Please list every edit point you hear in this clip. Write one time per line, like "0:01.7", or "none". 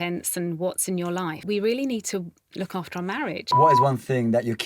0:01.4
0:03.6